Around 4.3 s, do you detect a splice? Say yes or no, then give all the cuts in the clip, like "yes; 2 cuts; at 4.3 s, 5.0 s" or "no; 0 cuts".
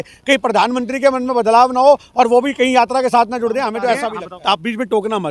yes; 1 cut; at 4.3 s